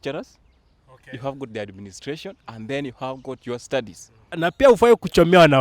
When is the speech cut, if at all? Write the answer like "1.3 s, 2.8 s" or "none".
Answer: 4.4 s